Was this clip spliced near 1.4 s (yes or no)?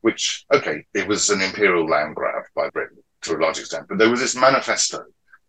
no